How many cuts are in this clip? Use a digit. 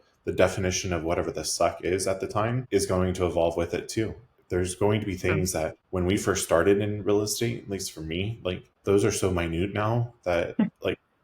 3